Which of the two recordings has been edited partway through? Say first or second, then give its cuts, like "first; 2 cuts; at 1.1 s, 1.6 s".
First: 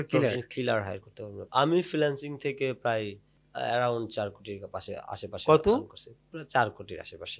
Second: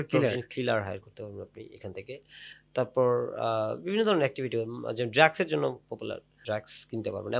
first; 1 cut; at 1.4 s